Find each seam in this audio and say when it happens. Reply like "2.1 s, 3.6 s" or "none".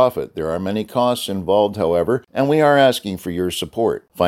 2.3 s